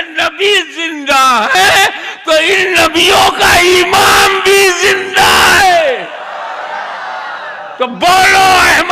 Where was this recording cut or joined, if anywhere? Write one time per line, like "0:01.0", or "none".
none